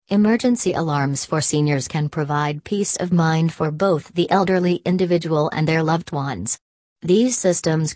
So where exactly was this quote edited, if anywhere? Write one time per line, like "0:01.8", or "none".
0:01.1